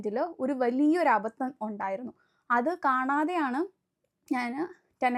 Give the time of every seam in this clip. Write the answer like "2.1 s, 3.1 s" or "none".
none